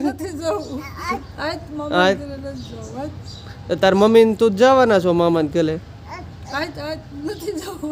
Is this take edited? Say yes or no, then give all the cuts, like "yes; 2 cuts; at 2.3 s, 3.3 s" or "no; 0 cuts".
no; 0 cuts